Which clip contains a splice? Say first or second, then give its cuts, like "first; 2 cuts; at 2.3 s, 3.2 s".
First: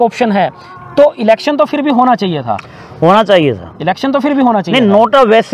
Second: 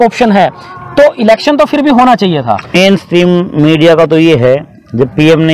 second; 1 cut; at 2.8 s